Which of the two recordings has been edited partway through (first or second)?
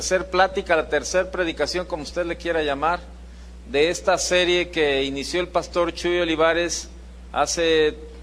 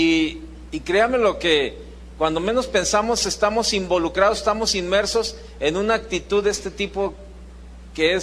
second